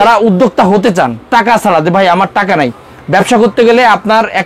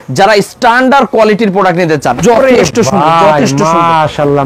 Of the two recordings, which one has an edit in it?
second; 1 cut; at 2.2 s

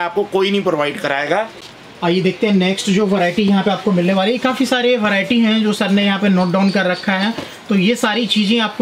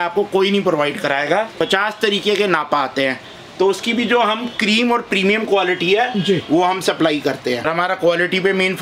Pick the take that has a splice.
second; 2 cuts; at 1.5 s, 7.6 s

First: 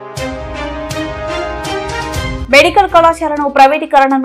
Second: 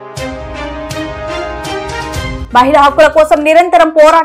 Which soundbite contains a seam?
second; 1 cut; at 2.4 s

